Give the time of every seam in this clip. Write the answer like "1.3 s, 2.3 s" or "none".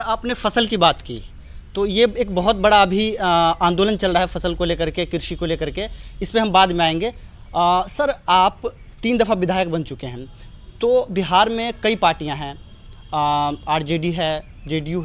none